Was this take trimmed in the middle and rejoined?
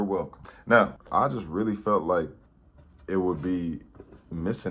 yes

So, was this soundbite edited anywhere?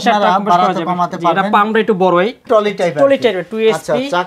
yes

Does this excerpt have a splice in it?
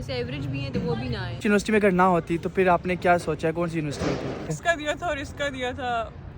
yes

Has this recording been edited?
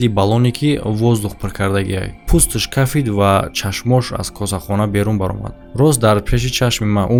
no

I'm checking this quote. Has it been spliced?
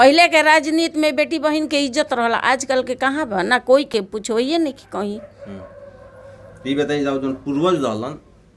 no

